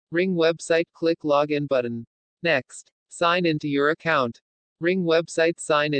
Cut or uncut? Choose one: cut